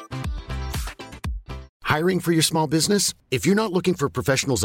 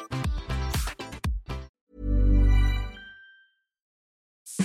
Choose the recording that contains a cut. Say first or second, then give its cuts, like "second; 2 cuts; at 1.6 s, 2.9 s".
first; 1 cut; at 1.7 s